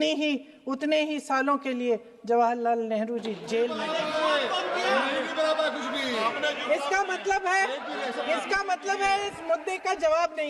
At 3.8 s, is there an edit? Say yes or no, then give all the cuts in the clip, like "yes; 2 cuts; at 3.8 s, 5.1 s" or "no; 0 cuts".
yes; 1 cut; at 3.8 s